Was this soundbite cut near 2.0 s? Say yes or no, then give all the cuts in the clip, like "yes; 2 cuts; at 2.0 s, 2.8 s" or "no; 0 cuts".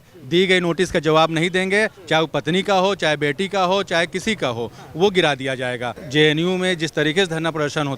no; 1 cut; at 6.0 s